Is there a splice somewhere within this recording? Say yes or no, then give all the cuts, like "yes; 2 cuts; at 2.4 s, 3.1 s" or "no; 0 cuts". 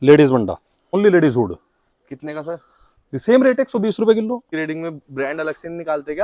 yes; 2 cuts; at 0.9 s, 4.5 s